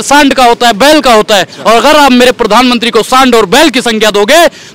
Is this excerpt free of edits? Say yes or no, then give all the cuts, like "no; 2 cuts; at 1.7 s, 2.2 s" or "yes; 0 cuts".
yes; 0 cuts